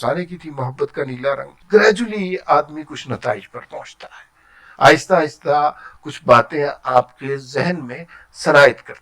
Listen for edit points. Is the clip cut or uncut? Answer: cut